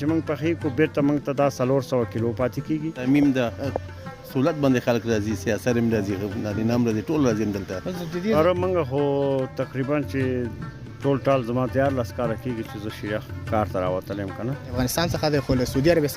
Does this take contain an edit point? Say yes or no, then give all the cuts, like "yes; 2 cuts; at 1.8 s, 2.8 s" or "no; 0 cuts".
yes; 3 cuts; at 3.0 s, 8.3 s, 14.7 s